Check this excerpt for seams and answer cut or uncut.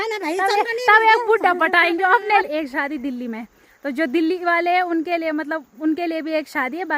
cut